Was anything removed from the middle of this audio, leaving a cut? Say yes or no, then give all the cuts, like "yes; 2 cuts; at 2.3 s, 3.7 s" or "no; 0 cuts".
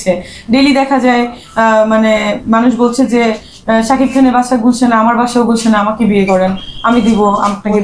no; 0 cuts